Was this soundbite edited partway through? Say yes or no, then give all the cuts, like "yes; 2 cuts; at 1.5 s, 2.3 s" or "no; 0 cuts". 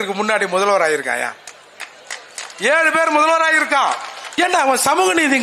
yes; 1 cut; at 4.2 s